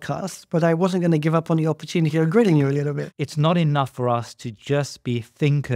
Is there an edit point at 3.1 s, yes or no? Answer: yes